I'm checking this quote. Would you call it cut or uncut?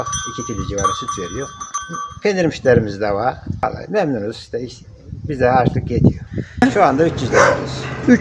cut